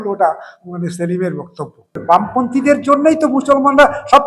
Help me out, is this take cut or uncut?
cut